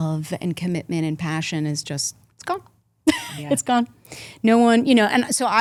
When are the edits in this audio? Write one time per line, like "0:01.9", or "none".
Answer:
none